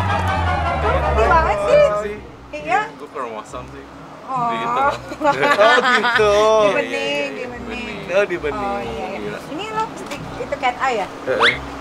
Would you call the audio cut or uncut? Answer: uncut